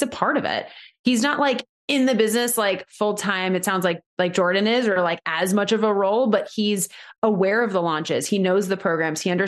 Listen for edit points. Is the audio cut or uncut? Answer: uncut